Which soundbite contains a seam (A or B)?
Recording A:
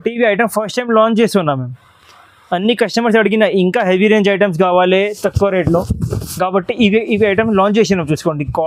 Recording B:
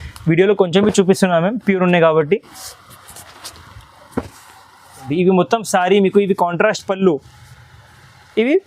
B